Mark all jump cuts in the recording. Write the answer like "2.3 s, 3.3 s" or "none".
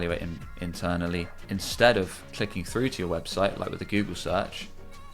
1.4 s